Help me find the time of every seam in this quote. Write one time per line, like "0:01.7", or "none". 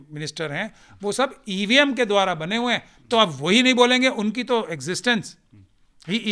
none